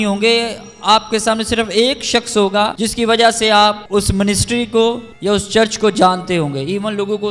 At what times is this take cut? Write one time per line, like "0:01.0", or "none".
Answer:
0:02.7
0:03.8
0:05.1